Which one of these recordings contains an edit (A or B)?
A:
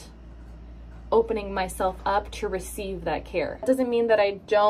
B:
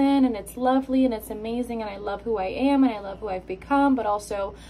A